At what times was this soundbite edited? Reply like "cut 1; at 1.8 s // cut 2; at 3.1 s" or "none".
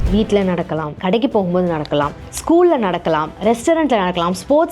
cut 1; at 0.9 s